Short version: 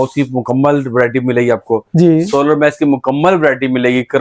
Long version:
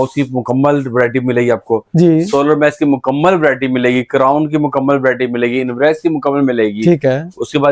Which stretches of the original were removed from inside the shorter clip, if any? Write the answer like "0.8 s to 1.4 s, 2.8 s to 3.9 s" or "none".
none